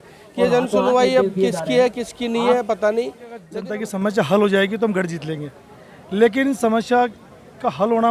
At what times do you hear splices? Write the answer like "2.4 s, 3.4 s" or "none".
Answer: 3.5 s

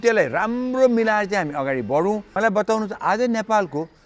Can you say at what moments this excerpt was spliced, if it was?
2.3 s

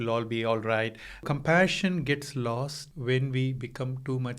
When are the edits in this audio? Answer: 1.2 s, 2.8 s

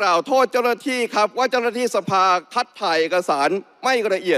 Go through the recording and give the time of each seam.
none

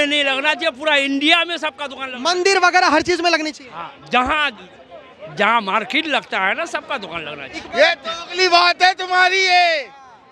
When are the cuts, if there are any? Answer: 7.7 s

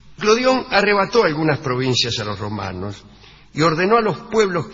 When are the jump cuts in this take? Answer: none

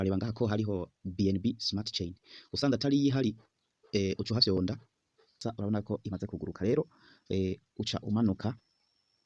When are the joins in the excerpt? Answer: 5.4 s

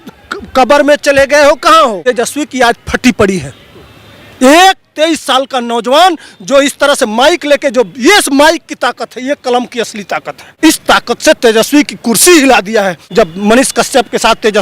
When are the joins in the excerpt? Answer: 2.0 s, 10.4 s, 13.0 s

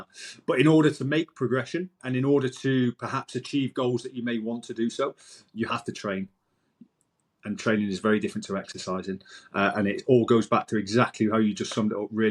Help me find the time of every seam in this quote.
2.0 s

